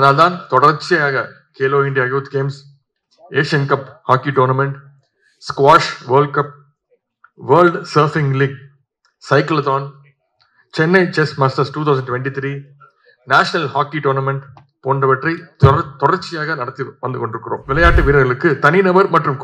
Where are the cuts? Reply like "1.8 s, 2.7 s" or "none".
17.6 s